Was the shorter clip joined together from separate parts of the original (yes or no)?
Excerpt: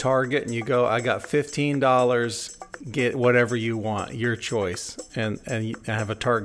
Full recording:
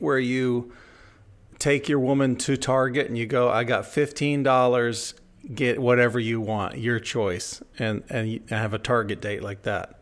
no